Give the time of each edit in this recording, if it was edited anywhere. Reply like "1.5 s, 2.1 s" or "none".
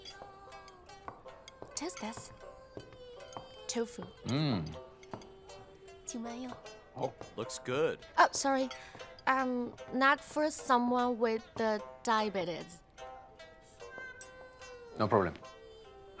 none